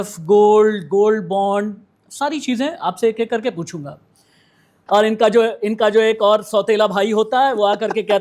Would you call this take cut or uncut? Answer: cut